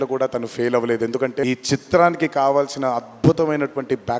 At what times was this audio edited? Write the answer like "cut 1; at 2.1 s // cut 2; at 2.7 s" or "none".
cut 1; at 1.4 s